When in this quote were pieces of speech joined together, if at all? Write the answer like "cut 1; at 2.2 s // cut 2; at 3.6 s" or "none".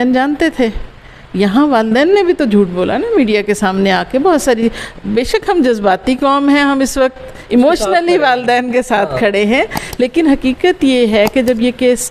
none

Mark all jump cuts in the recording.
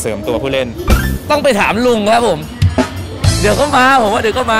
cut 1; at 3.0 s

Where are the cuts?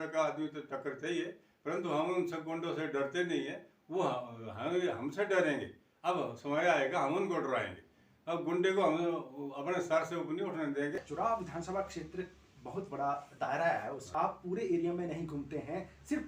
cut 1; at 11.0 s // cut 2; at 14.0 s

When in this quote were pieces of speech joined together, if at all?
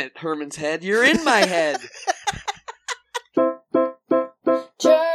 cut 1; at 3.3 s

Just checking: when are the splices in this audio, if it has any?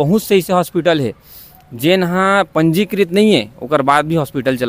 none

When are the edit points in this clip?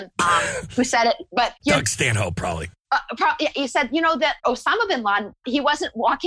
cut 1; at 1.6 s // cut 2; at 2.7 s // cut 3; at 4.4 s // cut 4; at 5.4 s

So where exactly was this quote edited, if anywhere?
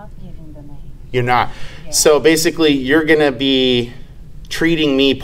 none

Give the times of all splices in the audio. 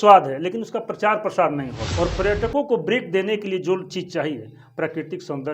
cut 1; at 1.8 s

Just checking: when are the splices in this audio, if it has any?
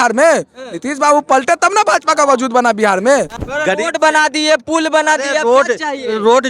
cut 1; at 3.4 s

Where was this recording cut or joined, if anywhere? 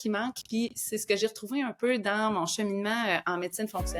none

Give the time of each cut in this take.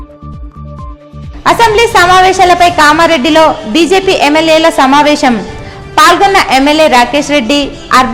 cut 1; at 1.3 s

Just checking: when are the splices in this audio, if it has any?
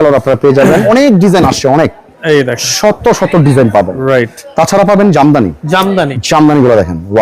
cut 1; at 0.8 s // cut 2; at 4.4 s // cut 3; at 6.2 s

